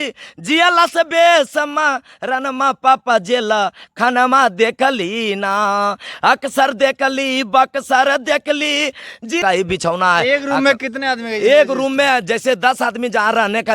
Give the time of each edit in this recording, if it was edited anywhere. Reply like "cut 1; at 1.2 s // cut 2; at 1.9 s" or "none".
cut 1; at 9.4 s